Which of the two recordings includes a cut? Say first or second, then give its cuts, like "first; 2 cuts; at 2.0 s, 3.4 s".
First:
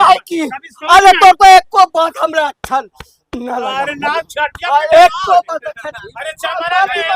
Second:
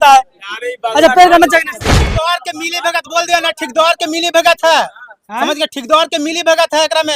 second; 1 cut; at 2.0 s